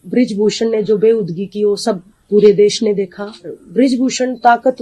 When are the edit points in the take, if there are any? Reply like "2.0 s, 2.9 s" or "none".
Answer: 3.6 s